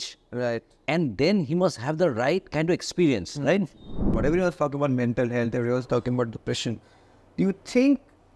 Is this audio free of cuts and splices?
no; 1 cut; at 4.1 s

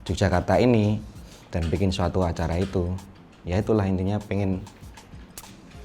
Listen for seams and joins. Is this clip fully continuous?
yes; 0 cuts

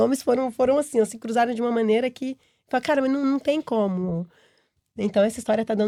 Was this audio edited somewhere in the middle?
no; 0 cuts

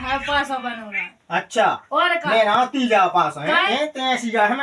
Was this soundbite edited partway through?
yes; 1 cut; at 3.7 s

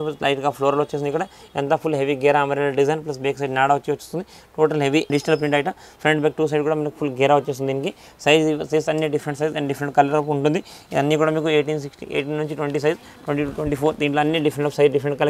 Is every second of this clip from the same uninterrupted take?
yes; 0 cuts

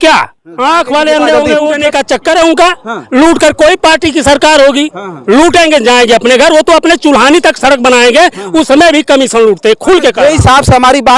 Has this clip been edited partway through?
yes; 1 cut; at 1.8 s

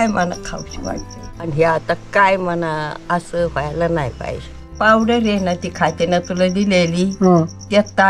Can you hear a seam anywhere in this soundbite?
yes; 2 cuts; at 1.4 s, 4.6 s

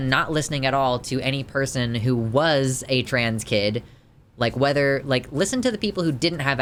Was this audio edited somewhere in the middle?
no; 0 cuts

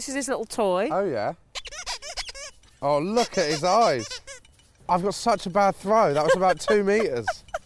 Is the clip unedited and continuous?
yes; 0 cuts

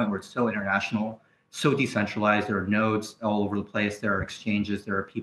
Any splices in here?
no; 0 cuts

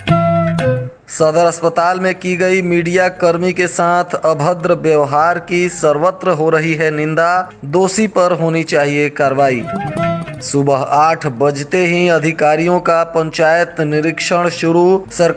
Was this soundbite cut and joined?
yes; 1 cut; at 0.9 s

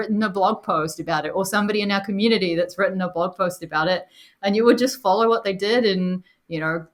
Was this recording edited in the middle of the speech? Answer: no; 0 cuts

